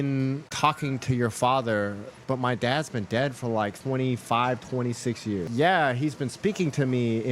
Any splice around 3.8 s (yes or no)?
yes